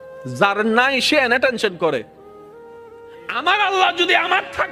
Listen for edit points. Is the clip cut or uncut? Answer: cut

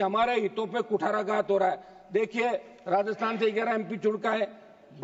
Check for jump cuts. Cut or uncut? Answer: uncut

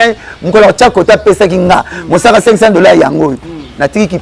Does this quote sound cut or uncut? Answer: uncut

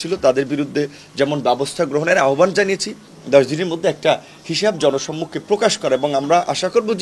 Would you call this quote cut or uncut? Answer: cut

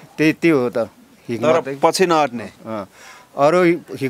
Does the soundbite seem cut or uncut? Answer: uncut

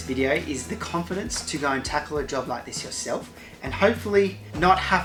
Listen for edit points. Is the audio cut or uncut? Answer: uncut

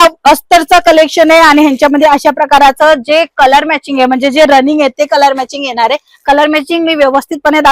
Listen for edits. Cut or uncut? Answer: uncut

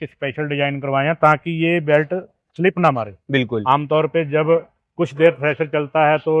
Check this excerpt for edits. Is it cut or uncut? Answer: uncut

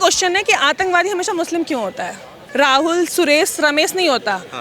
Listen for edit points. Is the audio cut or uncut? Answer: cut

